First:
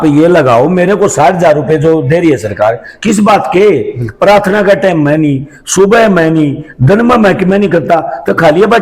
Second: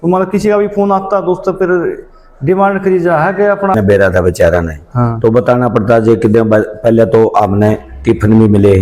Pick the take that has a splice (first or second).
second